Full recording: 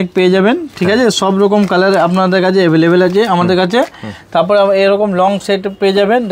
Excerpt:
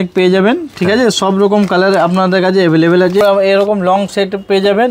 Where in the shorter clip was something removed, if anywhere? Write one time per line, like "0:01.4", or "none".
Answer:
0:03.2